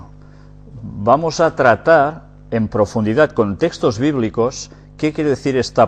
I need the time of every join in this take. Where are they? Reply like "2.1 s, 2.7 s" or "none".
none

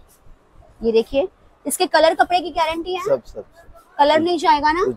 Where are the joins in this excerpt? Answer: none

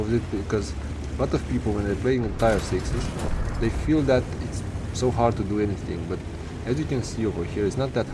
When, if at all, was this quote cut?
none

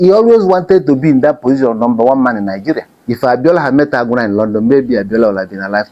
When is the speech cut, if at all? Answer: 2.9 s

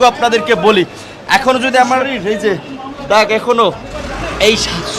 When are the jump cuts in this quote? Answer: 2.1 s

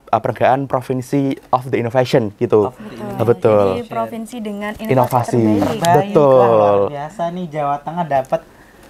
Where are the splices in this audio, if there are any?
none

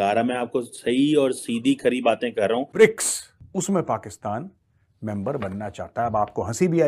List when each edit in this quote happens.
2.7 s

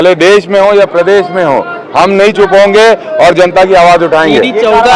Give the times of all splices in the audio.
none

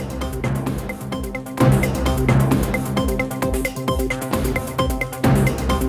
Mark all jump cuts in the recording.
1.6 s

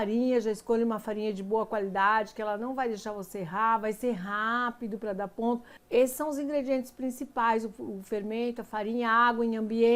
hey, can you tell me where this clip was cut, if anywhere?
5.7 s

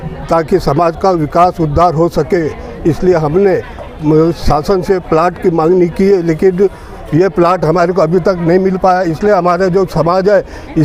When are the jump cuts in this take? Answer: none

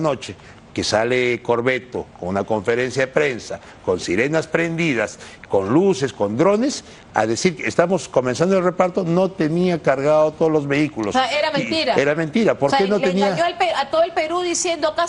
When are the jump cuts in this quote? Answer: none

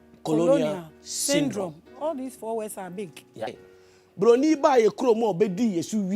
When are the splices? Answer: 3.7 s

